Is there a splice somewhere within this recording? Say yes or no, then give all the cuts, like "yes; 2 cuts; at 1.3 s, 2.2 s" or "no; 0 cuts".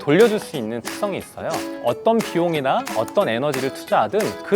yes; 1 cut; at 1.8 s